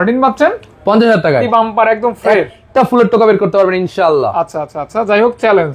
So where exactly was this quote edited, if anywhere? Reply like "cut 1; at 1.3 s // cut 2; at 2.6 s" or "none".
cut 1; at 1.4 s